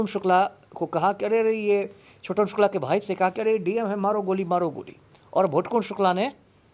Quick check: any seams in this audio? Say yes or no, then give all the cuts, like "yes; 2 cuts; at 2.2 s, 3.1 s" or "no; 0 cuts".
no; 0 cuts